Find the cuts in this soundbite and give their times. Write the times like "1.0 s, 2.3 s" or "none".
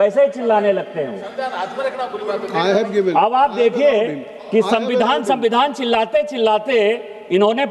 none